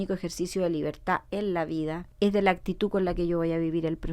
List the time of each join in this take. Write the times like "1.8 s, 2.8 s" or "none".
2.1 s